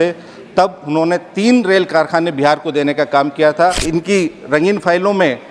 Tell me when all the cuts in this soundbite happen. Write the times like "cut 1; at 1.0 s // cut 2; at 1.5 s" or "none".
cut 1; at 3.8 s